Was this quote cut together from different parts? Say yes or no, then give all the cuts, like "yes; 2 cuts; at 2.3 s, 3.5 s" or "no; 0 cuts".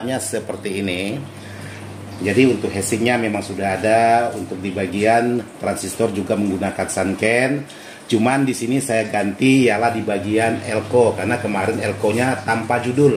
no; 0 cuts